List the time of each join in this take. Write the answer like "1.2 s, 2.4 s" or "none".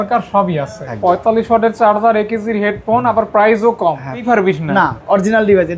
0.9 s, 4.2 s